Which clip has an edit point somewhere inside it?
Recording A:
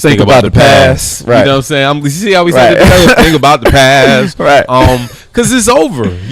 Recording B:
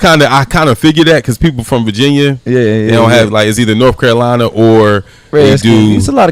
B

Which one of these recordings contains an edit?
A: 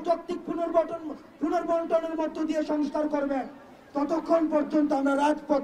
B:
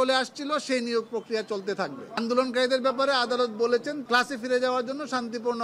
B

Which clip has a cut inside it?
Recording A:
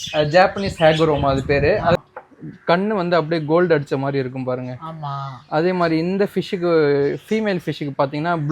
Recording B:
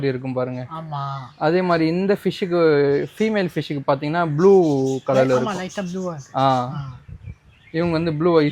A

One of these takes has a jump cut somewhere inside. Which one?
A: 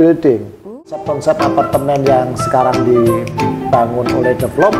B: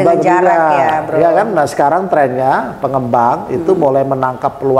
A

